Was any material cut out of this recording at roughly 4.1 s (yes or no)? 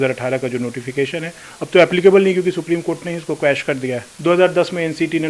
yes